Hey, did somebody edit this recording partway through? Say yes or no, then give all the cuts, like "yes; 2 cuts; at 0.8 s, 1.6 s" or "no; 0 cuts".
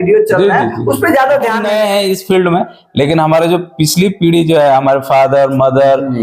yes; 1 cut; at 1.6 s